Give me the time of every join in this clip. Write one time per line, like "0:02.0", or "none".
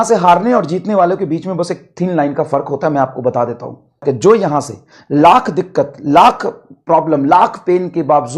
0:04.0